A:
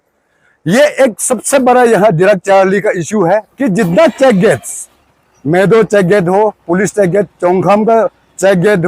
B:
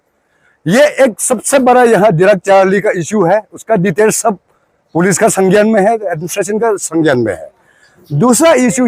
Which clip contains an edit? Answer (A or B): A